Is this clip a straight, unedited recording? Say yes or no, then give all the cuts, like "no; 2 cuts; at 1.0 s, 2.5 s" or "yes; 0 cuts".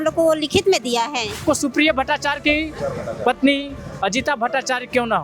no; 1 cut; at 1.4 s